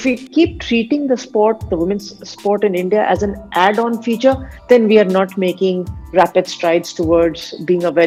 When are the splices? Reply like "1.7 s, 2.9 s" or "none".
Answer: none